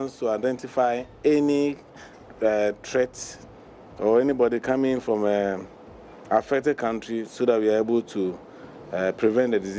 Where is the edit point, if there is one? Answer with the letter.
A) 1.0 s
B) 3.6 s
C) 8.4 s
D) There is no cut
D